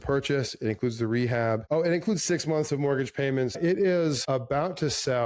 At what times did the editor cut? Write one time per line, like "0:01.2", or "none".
0:03.5